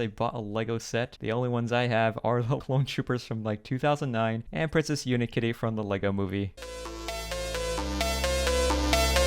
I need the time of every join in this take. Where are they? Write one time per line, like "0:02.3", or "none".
0:02.6
0:06.6